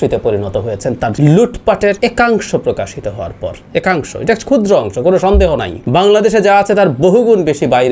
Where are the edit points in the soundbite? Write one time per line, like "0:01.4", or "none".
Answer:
0:01.1
0:02.0
0:05.7